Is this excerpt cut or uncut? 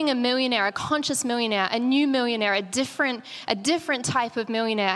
uncut